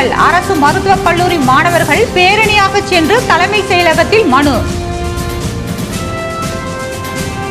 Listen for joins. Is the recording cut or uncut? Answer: cut